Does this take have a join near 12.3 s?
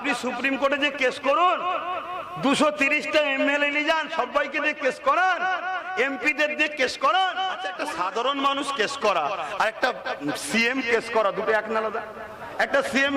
no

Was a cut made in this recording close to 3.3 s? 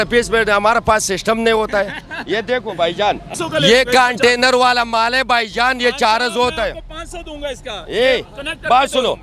yes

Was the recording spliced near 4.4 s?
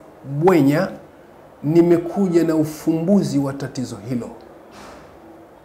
no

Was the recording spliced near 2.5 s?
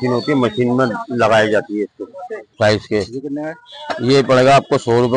yes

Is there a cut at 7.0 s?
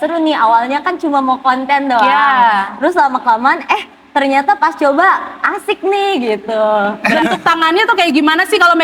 yes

